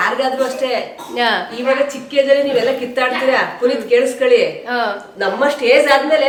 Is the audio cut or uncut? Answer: uncut